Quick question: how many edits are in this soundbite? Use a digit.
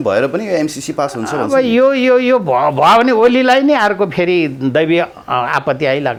0